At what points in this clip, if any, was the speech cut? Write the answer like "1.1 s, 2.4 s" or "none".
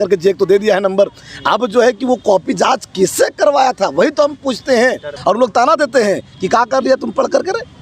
5.1 s